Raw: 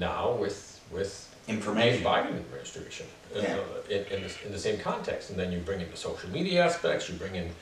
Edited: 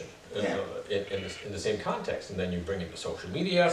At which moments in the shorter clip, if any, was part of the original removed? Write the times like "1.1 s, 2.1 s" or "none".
none